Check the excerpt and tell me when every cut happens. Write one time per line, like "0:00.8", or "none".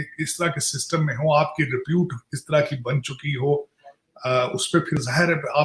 none

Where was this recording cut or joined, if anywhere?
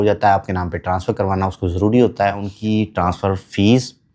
0:02.5

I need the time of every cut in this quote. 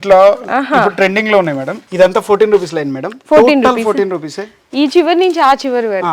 0:01.7

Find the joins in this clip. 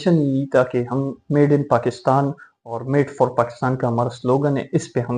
none

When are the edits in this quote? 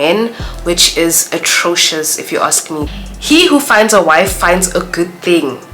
0:02.9

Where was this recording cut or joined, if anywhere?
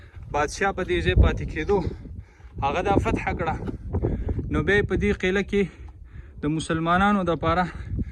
none

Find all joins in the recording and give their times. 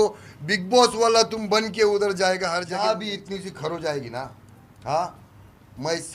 0:02.7

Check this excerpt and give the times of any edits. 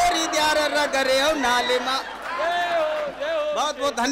none

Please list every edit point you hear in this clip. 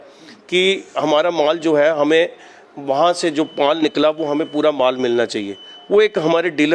none

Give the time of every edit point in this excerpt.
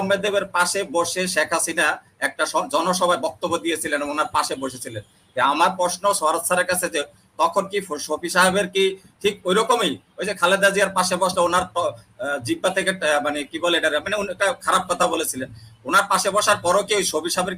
none

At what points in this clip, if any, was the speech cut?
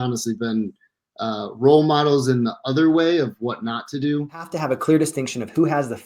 0:04.5

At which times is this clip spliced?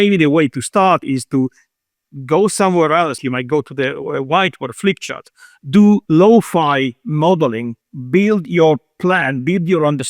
0:03.2
0:06.0

